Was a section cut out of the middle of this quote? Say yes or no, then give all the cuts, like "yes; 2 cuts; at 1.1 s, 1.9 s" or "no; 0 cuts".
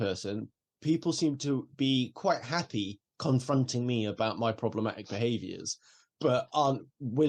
no; 0 cuts